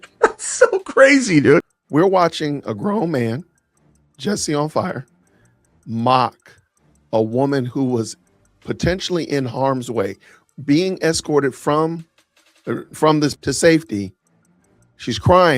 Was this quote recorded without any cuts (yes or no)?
no